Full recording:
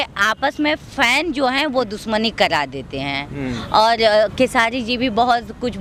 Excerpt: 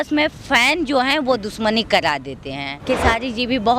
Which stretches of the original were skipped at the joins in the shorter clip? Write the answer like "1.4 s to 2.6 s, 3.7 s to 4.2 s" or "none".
3.3 s to 4.3 s

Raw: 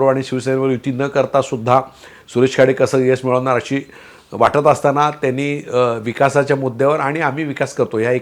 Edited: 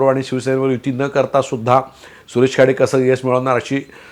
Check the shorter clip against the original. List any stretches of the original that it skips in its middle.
none

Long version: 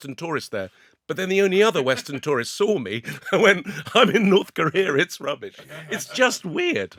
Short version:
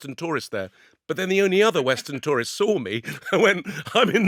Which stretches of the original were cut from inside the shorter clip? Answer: none

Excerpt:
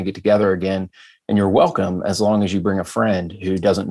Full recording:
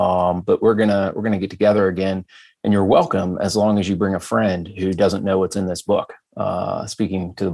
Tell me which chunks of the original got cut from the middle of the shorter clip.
none

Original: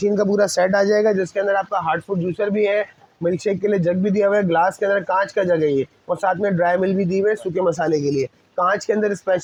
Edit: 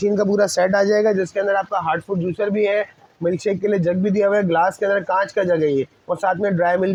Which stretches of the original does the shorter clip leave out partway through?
none

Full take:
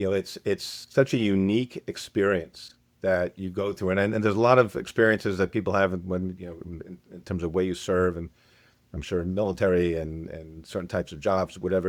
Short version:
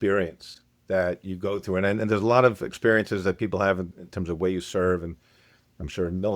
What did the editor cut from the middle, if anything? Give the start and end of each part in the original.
6.0 s to 7.0 s

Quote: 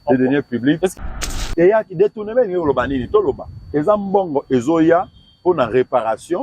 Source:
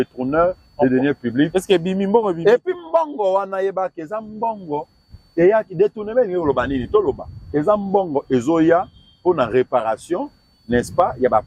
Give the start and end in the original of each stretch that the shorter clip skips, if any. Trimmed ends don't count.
1.6 s to 4.7 s

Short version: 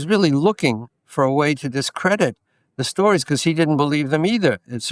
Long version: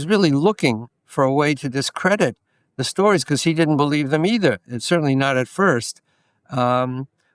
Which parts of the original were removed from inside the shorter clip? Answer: none

